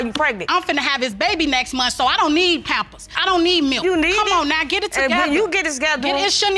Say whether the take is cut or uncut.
uncut